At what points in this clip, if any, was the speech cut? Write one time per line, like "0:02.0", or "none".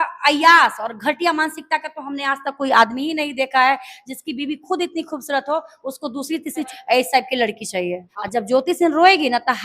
0:06.8
0:08.1